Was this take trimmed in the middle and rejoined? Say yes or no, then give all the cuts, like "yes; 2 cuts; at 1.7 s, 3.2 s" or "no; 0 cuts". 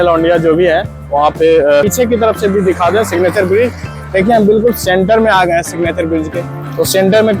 yes; 1 cut; at 1.9 s